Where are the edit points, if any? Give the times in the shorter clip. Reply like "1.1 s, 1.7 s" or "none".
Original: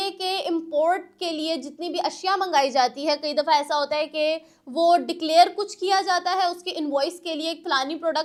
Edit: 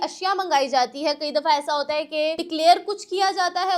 2.4 s